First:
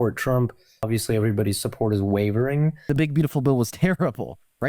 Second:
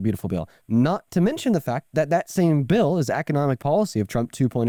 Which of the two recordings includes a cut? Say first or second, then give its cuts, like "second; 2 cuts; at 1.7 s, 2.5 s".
first; 2 cuts; at 0.8 s, 2.9 s